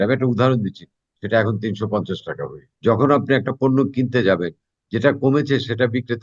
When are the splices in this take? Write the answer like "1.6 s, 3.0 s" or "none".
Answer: 2.6 s